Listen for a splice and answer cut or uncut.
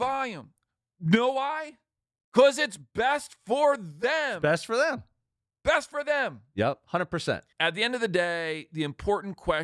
cut